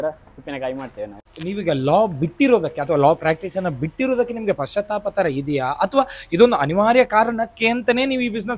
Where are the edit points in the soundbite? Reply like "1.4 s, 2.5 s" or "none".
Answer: 1.2 s